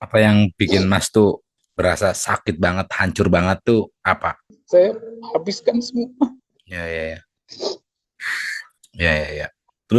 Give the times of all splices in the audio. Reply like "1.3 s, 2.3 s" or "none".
4.5 s

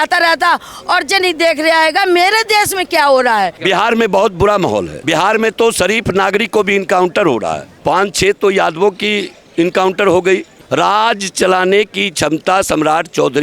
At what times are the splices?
3.6 s, 7.7 s, 10.6 s

